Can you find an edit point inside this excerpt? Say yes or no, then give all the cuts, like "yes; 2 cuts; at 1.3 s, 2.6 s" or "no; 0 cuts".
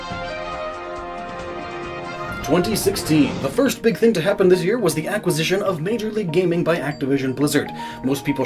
yes; 1 cut; at 7.5 s